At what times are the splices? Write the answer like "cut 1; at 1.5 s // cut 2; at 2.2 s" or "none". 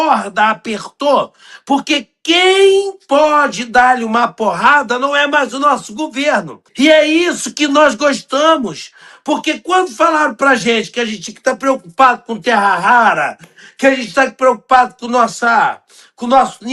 cut 1; at 6.6 s

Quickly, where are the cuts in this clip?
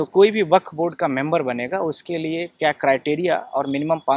none

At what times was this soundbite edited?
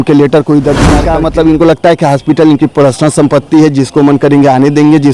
cut 1; at 1.0 s

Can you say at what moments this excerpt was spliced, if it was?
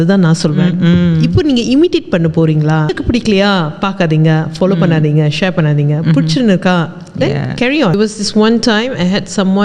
cut 1; at 2.9 s // cut 2; at 7.9 s

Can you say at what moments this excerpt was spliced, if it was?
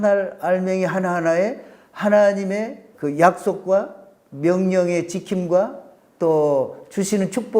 cut 1; at 2.8 s

